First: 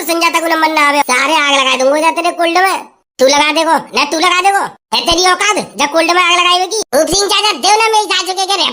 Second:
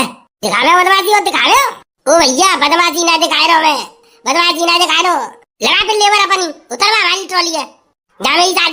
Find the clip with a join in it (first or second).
first